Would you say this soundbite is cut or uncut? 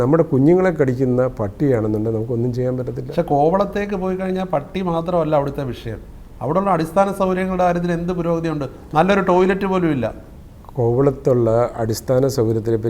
uncut